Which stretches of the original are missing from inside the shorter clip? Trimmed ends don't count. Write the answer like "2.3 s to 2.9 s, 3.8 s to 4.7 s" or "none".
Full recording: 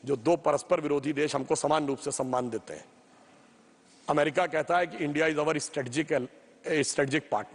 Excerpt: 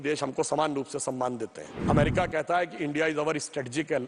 2.8 s to 3.9 s